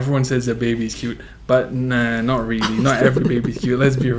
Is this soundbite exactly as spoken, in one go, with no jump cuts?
yes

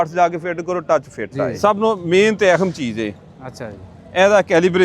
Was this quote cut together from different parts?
yes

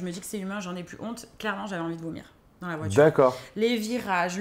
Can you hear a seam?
no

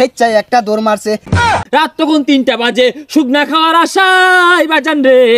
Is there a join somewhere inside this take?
yes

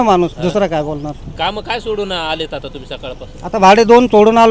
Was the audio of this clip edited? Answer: no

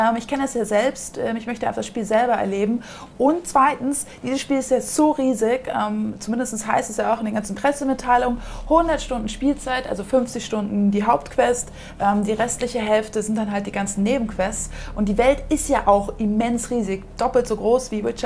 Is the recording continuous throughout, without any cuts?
yes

